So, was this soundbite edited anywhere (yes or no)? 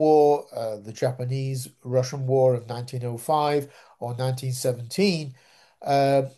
no